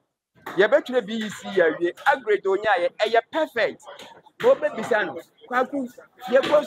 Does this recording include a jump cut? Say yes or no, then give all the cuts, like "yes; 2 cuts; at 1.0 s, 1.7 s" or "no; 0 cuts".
no; 0 cuts